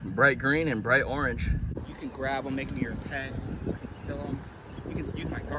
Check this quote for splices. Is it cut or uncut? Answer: cut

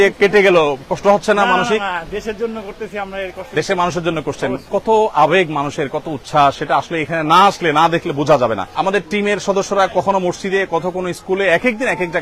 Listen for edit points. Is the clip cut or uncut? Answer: cut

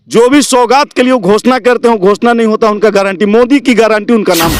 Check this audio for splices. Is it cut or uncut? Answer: uncut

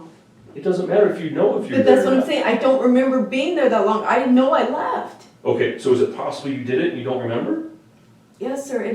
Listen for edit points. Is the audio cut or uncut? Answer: uncut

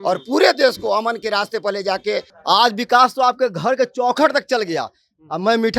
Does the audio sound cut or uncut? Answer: cut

